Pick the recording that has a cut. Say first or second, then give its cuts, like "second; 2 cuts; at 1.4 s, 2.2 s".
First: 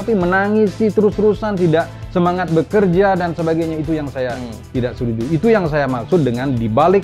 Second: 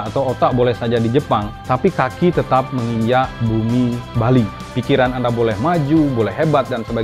second; 3 cuts; at 1.5 s, 3.4 s, 4.6 s